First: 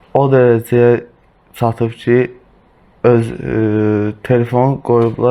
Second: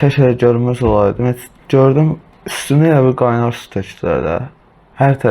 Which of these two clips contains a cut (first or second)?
second